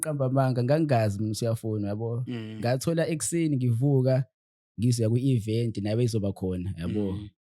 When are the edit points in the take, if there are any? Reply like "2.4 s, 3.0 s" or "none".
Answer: none